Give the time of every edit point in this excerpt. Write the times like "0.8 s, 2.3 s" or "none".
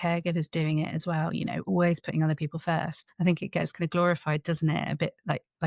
none